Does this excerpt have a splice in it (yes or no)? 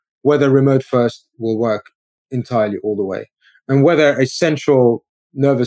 no